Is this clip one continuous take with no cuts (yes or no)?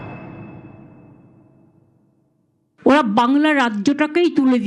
no